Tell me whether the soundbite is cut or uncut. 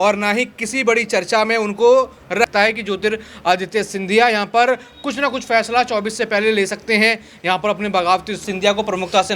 cut